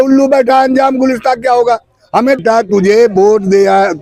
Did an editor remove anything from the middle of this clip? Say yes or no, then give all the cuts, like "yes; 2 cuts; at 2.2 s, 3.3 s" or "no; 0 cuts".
yes; 1 cut; at 2.4 s